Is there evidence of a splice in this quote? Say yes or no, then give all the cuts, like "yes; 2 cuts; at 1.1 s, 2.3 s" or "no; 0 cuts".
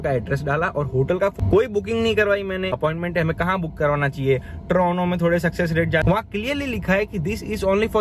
yes; 3 cuts; at 1.3 s, 2.7 s, 6.0 s